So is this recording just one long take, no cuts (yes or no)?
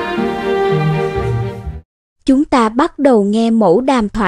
no